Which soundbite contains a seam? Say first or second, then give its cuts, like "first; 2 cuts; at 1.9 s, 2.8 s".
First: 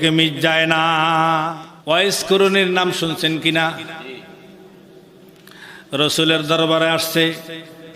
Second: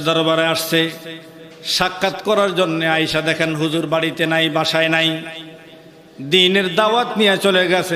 first; 1 cut; at 1.7 s